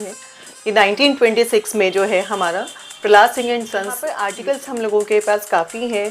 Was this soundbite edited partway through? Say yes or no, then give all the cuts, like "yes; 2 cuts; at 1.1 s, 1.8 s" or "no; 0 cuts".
yes; 1 cut; at 4.3 s